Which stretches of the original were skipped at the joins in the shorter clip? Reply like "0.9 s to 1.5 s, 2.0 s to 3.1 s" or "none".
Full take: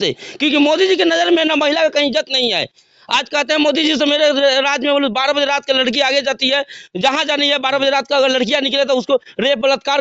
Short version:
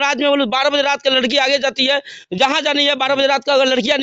none